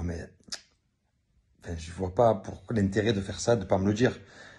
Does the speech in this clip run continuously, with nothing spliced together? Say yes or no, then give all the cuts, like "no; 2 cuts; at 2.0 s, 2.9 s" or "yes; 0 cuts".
no; 1 cut; at 2.9 s